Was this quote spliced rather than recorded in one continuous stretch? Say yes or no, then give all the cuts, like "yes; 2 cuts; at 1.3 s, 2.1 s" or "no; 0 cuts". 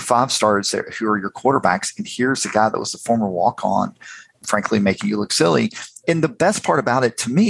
yes; 1 cut; at 4.4 s